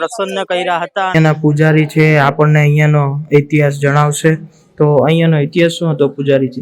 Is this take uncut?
no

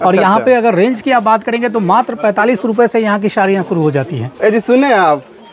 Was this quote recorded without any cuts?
yes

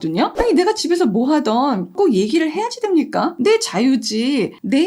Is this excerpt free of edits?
no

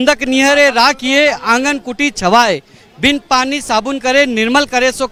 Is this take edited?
no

